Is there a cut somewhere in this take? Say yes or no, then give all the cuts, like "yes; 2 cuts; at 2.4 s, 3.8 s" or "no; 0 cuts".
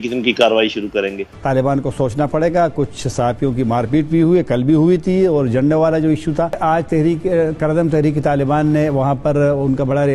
yes; 2 cuts; at 1.2 s, 6.6 s